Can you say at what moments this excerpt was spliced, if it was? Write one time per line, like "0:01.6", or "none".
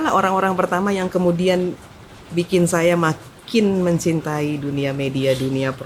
none